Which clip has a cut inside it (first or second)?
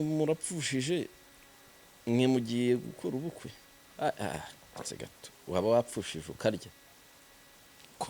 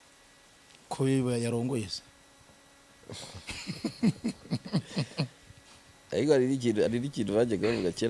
first